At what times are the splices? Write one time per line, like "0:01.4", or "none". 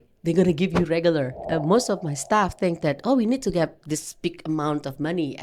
0:01.4